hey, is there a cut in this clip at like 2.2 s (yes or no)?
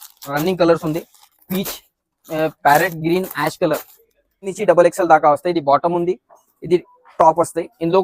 no